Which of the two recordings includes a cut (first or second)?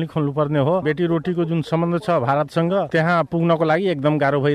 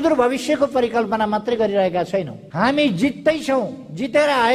second